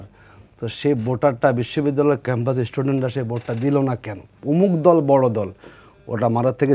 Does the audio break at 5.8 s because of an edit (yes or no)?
no